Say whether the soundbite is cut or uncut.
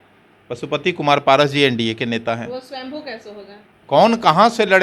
cut